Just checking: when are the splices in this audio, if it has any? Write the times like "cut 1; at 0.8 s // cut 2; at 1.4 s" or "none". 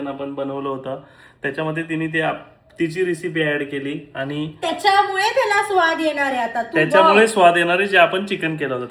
none